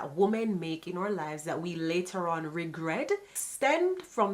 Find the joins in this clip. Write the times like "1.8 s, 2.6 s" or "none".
3.4 s